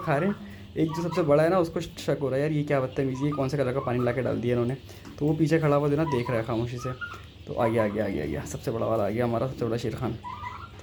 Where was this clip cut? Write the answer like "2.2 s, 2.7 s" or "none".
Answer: none